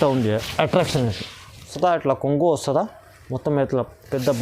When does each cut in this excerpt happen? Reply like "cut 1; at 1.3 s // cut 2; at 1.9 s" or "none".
cut 1; at 1.7 s